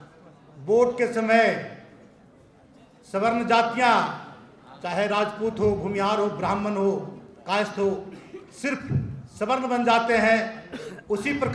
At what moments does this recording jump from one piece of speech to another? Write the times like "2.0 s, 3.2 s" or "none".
none